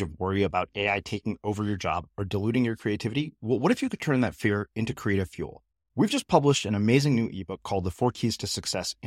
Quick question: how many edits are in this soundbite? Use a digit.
0